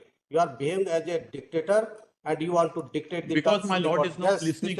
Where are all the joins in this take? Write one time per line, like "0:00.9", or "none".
none